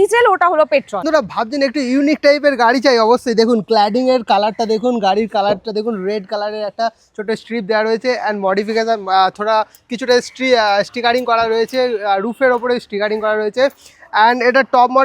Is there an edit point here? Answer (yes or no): yes